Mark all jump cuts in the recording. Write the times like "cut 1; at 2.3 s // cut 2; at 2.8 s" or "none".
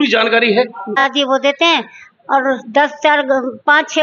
cut 1; at 1.1 s